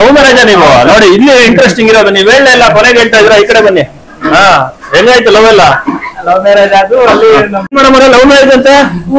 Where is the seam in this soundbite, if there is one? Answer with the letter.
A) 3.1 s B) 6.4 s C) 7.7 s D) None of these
C